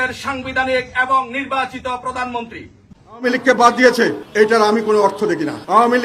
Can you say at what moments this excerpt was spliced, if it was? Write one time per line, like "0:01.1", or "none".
0:03.2